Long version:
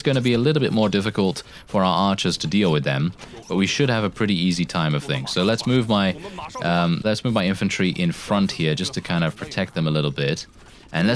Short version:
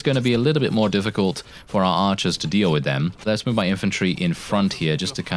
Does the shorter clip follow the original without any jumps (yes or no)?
no